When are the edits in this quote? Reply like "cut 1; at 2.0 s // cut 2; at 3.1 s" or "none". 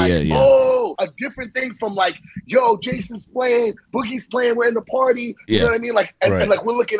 cut 1; at 0.9 s